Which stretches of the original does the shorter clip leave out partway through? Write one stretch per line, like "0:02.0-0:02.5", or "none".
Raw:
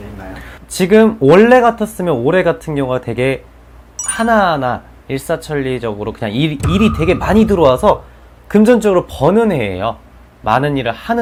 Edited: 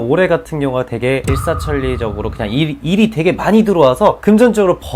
0:03.4-0:05.1
0:08.0-0:08.5